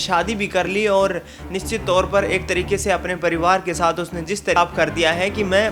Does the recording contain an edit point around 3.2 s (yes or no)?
no